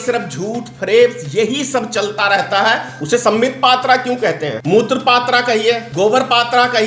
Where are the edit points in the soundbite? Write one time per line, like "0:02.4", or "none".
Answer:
0:02.9
0:04.6
0:05.9